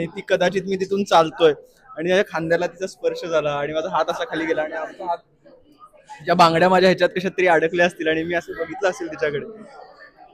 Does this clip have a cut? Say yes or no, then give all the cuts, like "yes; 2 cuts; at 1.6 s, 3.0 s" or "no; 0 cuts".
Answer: no; 0 cuts